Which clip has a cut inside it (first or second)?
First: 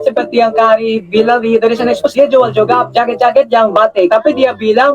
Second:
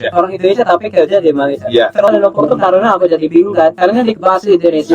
second